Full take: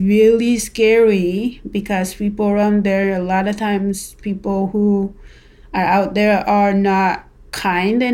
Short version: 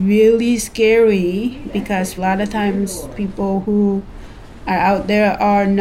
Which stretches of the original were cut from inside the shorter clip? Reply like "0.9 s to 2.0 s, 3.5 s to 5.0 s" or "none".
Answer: 2.1 s to 3.2 s